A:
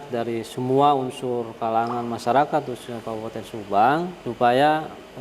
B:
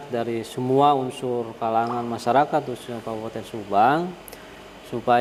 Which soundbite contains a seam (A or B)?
A